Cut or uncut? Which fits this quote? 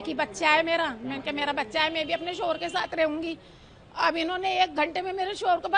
uncut